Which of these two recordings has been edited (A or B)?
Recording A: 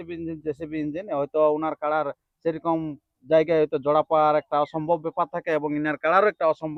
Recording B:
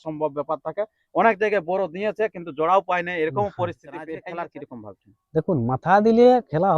B